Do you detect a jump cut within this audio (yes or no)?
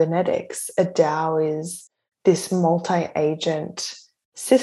no